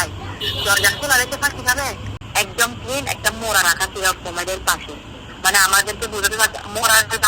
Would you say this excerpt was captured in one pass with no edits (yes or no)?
no